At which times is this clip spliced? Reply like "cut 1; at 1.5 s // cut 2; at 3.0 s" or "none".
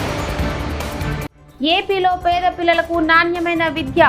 cut 1; at 1.4 s